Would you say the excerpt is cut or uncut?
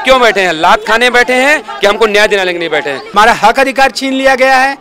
cut